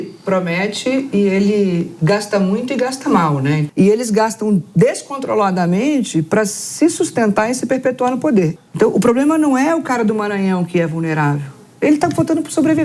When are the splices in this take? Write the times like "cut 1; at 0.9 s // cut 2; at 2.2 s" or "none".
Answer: cut 1; at 3.7 s // cut 2; at 8.6 s